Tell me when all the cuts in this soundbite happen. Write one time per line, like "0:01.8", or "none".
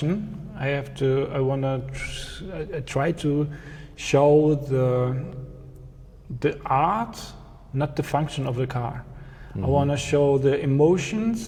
none